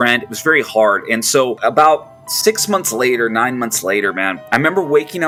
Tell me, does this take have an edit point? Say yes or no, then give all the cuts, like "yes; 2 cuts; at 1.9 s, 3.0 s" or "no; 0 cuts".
no; 0 cuts